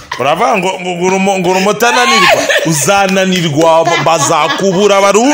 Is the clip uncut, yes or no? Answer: yes